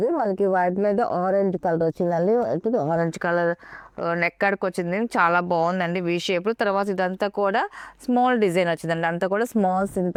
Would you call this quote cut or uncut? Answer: uncut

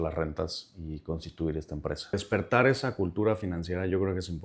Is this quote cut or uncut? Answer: cut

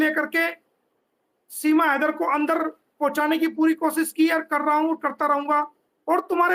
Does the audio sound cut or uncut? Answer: uncut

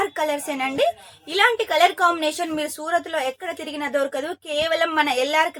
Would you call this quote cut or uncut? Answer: uncut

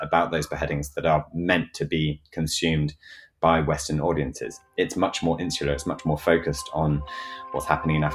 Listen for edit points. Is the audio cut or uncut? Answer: uncut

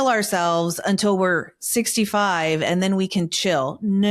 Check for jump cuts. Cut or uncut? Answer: uncut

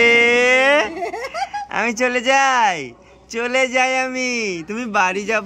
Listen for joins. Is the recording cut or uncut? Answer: uncut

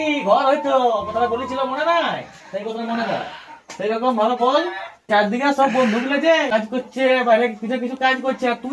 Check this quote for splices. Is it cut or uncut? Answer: uncut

